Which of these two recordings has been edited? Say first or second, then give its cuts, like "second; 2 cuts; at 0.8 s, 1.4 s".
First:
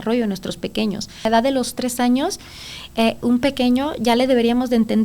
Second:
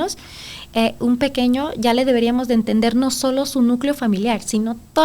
first; 1 cut; at 1.2 s